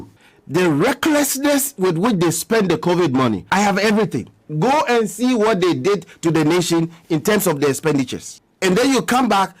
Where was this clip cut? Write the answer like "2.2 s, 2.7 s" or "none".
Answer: 3.4 s